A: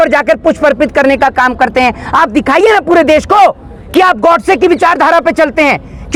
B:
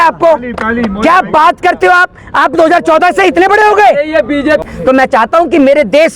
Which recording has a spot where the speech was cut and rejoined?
B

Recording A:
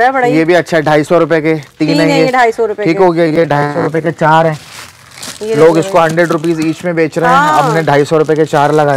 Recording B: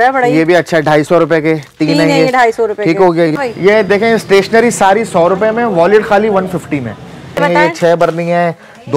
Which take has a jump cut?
B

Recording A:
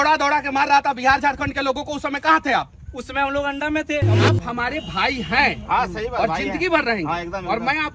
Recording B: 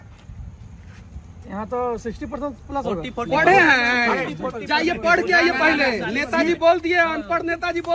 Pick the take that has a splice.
A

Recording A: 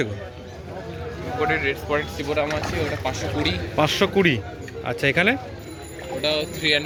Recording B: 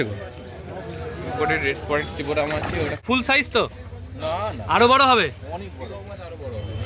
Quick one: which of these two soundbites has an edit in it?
B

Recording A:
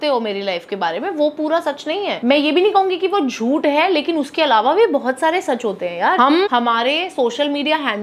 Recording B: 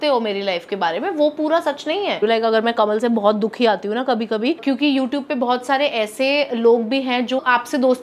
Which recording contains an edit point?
B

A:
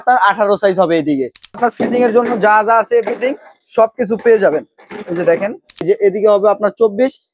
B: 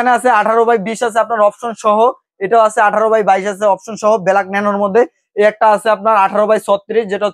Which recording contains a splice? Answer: A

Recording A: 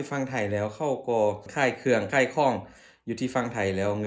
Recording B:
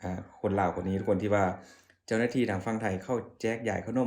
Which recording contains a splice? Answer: A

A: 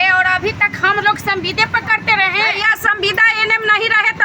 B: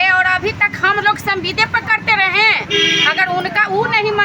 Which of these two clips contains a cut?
A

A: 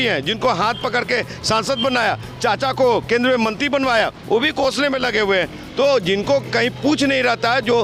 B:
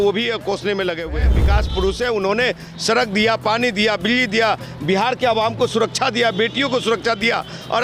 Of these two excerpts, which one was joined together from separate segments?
B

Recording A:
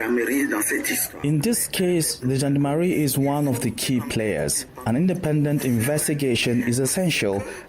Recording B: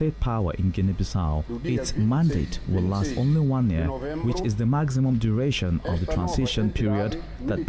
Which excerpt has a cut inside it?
A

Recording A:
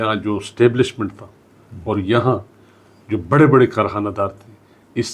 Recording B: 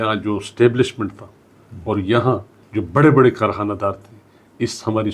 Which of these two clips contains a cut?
B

